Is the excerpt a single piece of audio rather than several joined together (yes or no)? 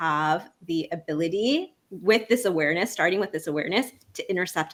yes